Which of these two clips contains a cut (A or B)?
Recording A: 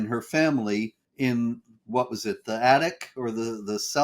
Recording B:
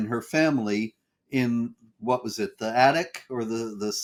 A